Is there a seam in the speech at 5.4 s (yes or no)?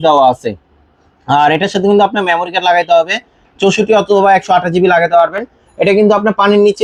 no